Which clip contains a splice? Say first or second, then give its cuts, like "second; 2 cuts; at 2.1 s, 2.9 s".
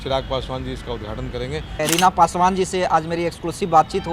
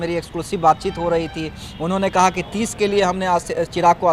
first; 1 cut; at 1.8 s